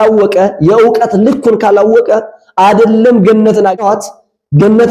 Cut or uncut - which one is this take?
cut